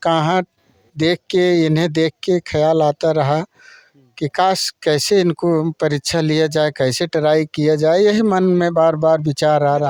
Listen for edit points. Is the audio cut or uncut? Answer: uncut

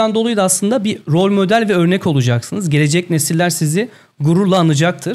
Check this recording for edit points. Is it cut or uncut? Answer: uncut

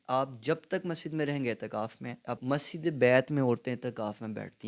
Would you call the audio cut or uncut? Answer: cut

